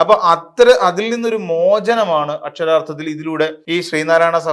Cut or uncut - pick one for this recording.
cut